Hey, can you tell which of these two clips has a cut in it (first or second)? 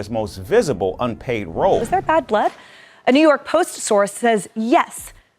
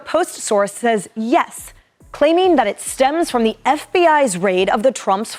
first